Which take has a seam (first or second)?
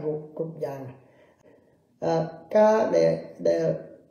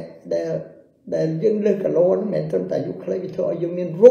first